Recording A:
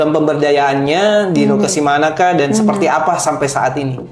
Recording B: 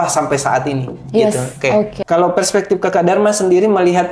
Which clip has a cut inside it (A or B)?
B